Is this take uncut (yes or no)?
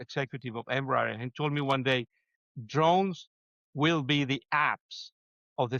yes